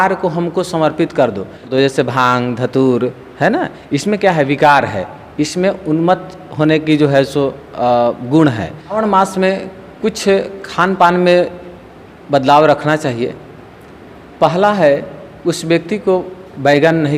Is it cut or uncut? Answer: cut